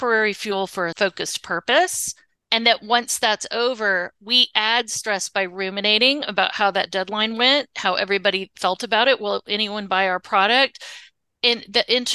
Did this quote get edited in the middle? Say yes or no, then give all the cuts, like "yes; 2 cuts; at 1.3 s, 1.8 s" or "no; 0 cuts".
yes; 1 cut; at 0.9 s